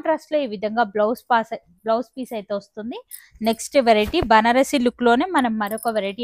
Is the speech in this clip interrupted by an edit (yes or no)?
no